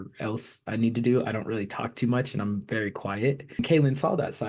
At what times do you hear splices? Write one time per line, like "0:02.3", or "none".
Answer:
0:03.6